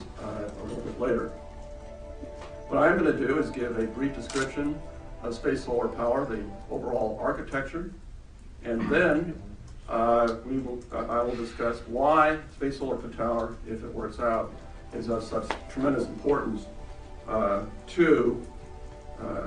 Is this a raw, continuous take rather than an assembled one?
no; 1 cut; at 14.8 s

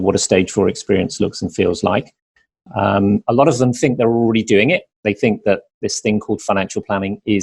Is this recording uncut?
yes; 0 cuts

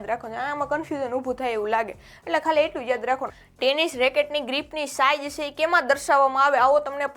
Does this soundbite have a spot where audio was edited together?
yes; 1 cut; at 3.3 s

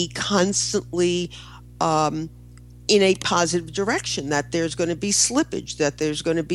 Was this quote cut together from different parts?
no; 0 cuts

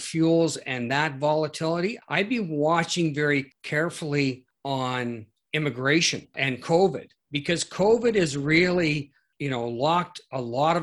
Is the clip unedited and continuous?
no; 5 cuts; at 2.0 s, 3.6 s, 4.8 s, 6.3 s, 9.2 s

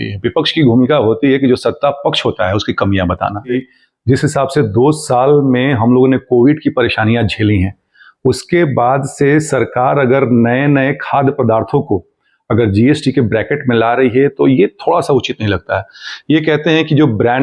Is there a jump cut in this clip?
yes; 1 cut; at 3.7 s

